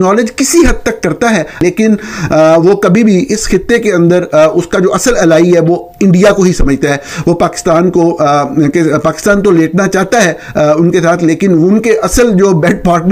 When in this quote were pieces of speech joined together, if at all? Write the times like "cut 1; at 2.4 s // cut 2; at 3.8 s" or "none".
cut 1; at 1.6 s